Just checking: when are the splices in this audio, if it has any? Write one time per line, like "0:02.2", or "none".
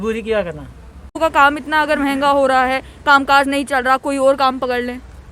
0:01.1